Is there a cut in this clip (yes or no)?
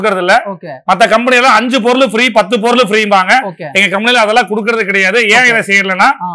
no